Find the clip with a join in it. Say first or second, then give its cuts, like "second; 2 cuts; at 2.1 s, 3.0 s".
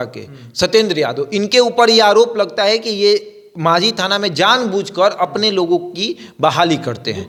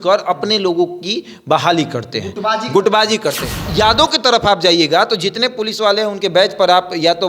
second; 1 cut; at 3.7 s